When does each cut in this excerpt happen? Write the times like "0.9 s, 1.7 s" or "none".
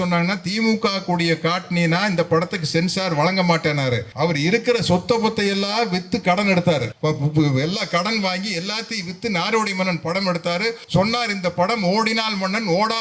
4.1 s, 6.9 s, 10.8 s

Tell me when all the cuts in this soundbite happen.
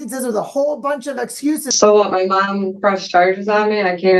1.7 s

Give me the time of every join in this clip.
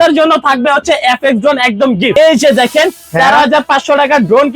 2.1 s

